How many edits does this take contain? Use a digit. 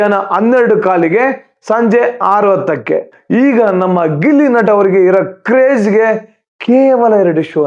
1